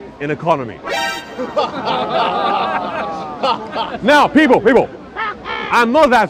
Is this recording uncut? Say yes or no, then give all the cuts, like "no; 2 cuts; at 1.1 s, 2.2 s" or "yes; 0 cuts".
yes; 0 cuts